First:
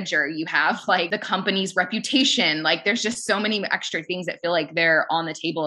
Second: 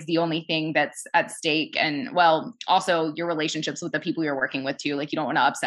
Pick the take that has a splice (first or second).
first